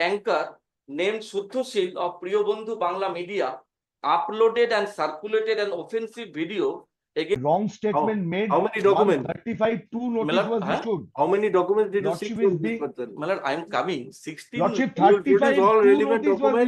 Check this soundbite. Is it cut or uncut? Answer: cut